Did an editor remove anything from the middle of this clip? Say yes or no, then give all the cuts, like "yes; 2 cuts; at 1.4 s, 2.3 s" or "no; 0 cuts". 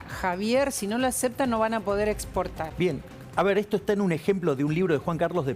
yes; 1 cut; at 2.6 s